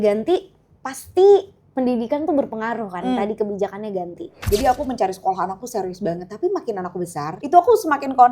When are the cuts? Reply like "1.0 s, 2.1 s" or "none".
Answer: 4.4 s, 7.4 s